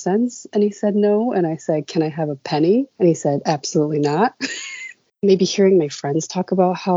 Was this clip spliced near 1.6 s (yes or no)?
no